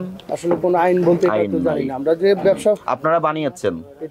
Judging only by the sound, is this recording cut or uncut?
uncut